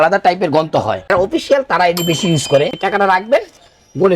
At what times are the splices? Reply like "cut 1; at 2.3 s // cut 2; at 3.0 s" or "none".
cut 1; at 1.1 s // cut 2; at 2.8 s